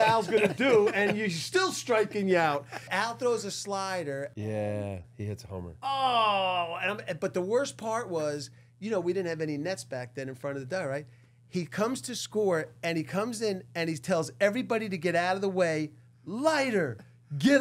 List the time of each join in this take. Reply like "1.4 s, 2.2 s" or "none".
2.9 s